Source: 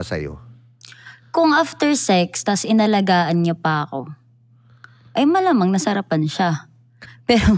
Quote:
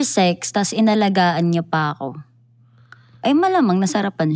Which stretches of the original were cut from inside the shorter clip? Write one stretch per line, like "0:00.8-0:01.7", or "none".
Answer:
none